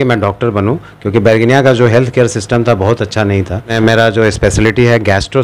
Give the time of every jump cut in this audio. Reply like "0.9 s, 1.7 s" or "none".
3.7 s